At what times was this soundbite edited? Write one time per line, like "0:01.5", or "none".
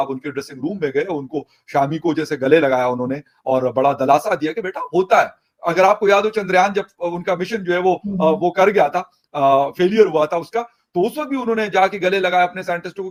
none